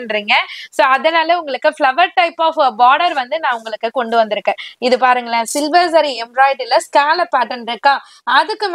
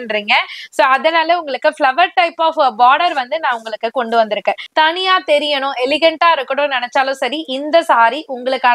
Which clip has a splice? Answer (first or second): second